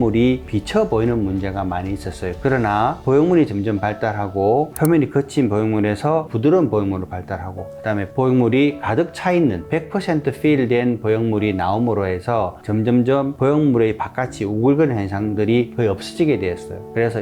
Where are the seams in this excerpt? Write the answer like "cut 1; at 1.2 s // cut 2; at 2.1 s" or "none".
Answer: cut 1; at 2.3 s